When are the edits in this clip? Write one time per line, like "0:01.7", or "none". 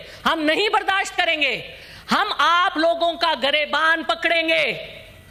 none